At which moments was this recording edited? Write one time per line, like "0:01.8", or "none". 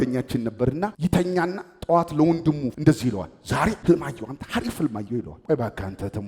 0:00.9
0:03.8
0:05.3